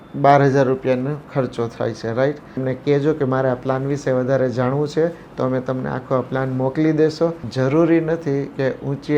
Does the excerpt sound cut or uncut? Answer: cut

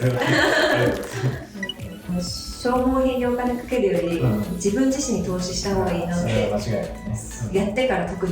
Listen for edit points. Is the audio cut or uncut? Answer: cut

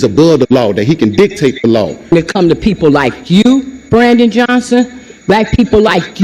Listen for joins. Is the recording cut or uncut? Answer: cut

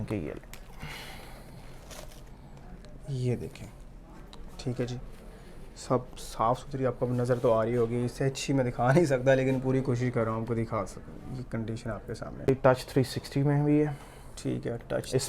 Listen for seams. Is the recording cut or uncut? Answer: cut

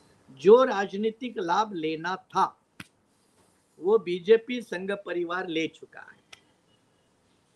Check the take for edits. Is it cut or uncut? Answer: uncut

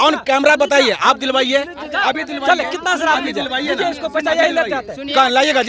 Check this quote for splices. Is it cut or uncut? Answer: uncut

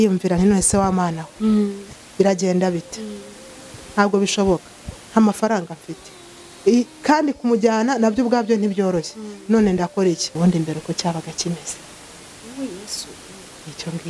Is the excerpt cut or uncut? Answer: cut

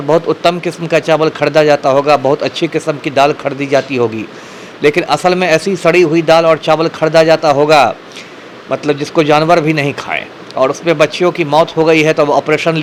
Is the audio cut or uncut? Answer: uncut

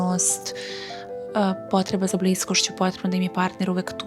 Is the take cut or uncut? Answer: uncut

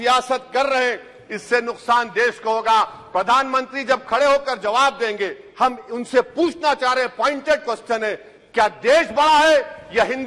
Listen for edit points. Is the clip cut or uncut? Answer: uncut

